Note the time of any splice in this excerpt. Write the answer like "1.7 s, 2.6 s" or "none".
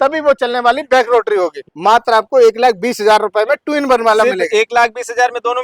1.6 s